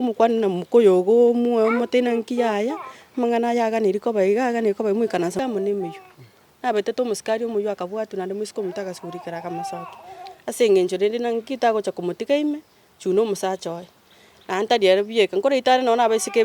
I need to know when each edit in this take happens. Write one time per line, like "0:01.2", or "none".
0:05.3